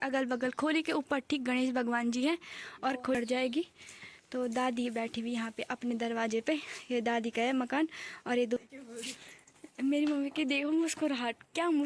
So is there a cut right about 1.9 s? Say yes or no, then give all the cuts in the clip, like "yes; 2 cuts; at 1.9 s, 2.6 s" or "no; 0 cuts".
no; 2 cuts; at 3.1 s, 8.6 s